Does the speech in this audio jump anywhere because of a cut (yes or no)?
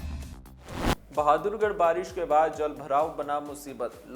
yes